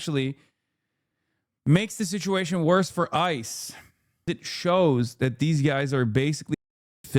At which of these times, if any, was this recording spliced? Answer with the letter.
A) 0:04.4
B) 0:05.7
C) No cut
A